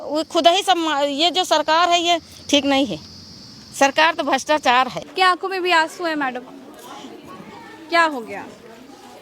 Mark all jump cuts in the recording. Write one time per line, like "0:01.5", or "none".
0:05.1